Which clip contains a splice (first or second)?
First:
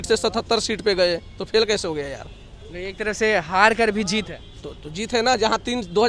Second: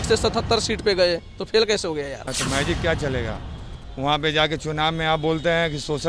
second